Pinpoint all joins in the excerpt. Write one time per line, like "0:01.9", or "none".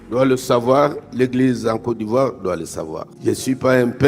0:03.0